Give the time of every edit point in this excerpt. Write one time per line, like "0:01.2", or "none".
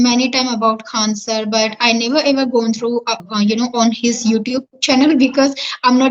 0:03.2